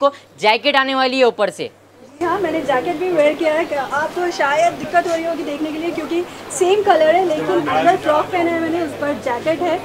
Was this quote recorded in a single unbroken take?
yes; 0 cuts

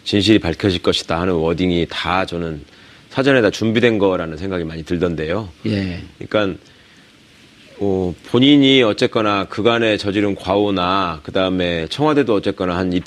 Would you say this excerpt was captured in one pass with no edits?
yes; 0 cuts

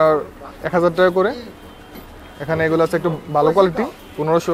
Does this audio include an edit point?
yes; 1 cut; at 1.9 s

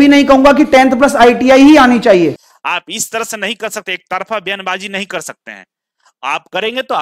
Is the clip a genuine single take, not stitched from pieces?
no; 1 cut; at 2.5 s

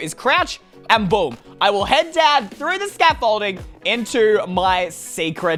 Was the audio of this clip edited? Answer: no; 0 cuts

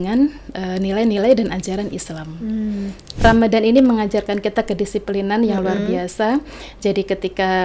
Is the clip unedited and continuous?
no; 1 cut; at 3.0 s

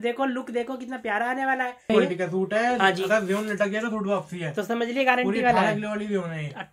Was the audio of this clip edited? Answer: yes; 1 cut; at 1.9 s

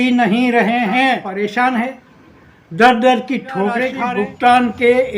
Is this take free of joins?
no; 2 cuts; at 1.3 s, 3.9 s

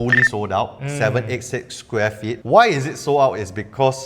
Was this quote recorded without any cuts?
no; 1 cut; at 2.4 s

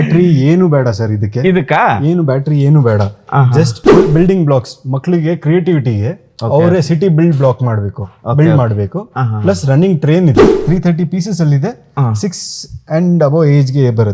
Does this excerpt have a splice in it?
yes; 2 cuts; at 4.1 s, 10.6 s

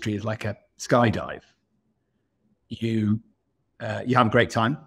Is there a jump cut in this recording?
no; 0 cuts

